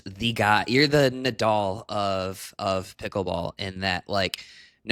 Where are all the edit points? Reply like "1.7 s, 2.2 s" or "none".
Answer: none